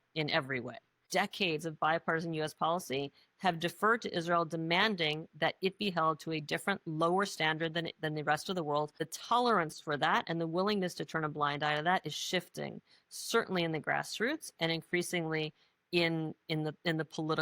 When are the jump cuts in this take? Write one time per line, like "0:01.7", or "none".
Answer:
0:01.0
0:09.1